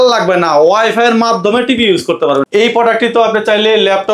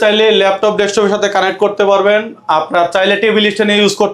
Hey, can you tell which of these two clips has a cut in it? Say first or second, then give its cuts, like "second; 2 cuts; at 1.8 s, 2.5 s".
first; 1 cut; at 2.4 s